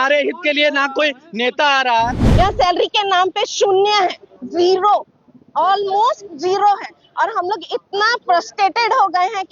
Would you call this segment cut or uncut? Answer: cut